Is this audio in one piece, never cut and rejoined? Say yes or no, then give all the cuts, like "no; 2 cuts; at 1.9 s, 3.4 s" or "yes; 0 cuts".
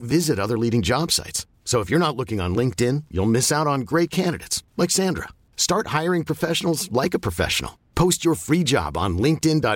yes; 0 cuts